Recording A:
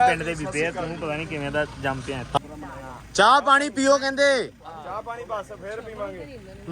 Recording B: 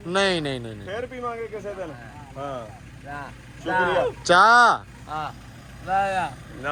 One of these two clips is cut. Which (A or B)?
A